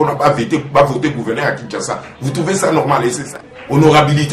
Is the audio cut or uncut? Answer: cut